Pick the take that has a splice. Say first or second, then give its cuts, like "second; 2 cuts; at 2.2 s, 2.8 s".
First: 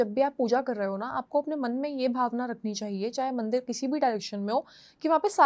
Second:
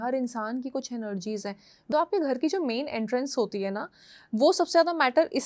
second; 1 cut; at 1.9 s